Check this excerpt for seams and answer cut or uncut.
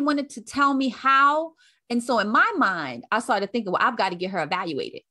uncut